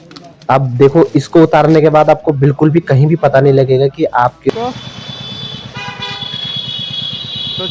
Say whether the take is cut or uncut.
cut